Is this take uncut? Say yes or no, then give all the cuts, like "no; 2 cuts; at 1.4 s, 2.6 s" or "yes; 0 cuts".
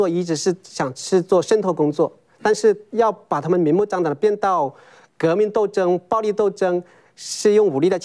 yes; 0 cuts